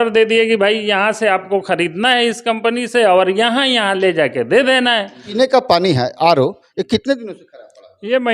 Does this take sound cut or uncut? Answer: cut